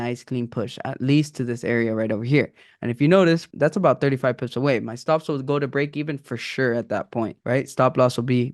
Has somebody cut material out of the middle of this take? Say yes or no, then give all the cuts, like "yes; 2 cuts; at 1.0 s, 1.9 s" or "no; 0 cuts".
yes; 2 cuts; at 3.5 s, 7.4 s